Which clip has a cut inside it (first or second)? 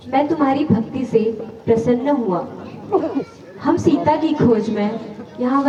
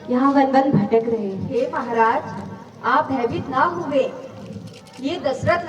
second